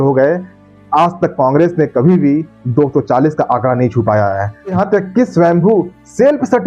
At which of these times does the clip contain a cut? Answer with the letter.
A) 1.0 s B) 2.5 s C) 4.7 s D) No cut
C